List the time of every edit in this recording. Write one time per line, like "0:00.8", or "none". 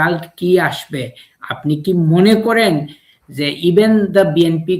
none